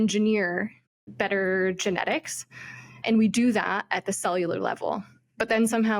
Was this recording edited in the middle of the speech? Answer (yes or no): no